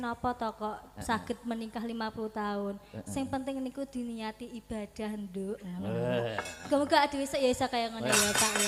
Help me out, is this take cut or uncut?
uncut